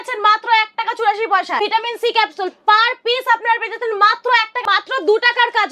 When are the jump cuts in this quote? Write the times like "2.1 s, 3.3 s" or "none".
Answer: 1.6 s, 4.6 s

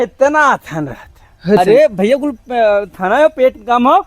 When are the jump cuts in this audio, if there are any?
1.6 s

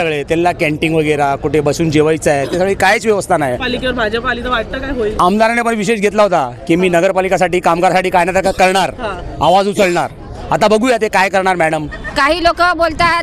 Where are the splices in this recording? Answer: 3.6 s, 12.0 s

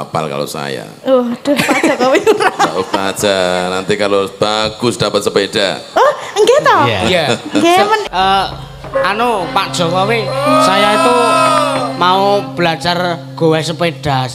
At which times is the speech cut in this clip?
8.1 s

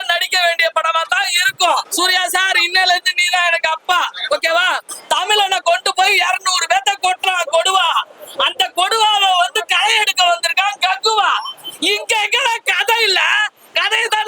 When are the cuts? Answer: 1.9 s, 4.9 s

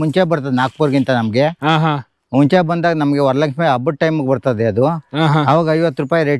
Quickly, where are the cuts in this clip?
none

